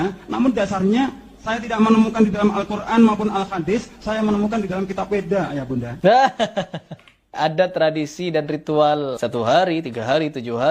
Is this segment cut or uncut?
cut